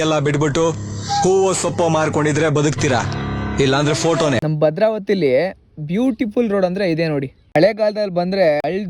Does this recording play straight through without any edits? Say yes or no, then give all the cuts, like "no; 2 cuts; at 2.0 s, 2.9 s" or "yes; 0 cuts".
no; 1 cut; at 4.4 s